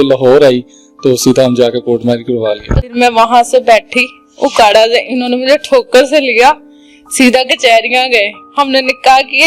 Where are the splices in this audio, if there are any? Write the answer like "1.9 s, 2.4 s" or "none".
2.9 s